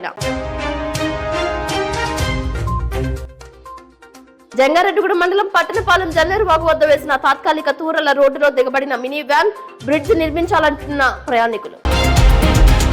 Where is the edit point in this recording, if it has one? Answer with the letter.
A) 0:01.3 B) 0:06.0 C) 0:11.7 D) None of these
C